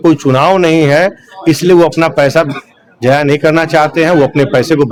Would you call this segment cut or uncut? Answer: uncut